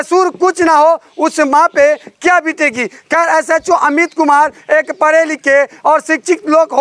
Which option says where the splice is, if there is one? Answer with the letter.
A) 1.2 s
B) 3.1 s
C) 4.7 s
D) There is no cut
D